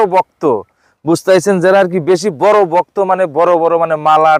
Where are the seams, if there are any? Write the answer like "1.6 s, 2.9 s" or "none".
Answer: none